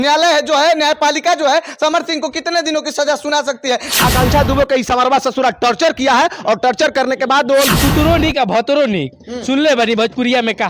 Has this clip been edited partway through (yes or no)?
yes